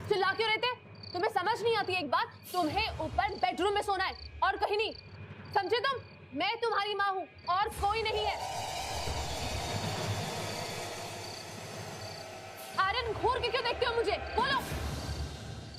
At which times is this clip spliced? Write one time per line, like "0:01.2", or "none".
0:06.1